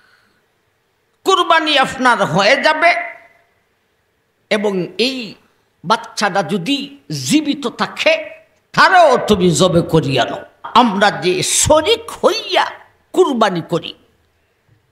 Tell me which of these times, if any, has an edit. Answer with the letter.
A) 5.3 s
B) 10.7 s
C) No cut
B